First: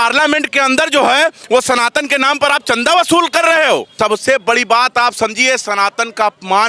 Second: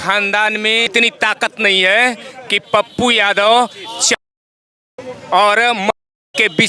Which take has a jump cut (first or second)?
first